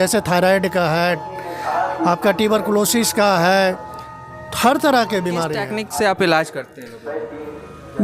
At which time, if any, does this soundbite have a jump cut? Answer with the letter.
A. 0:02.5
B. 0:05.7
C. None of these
B